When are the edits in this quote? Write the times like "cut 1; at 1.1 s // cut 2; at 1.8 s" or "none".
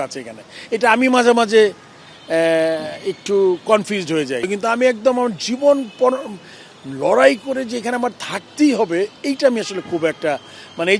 cut 1; at 4.5 s